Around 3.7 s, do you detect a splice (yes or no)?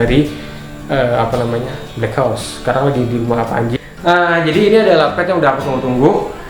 yes